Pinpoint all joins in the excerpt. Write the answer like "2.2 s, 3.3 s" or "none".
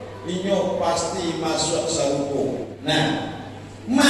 2.7 s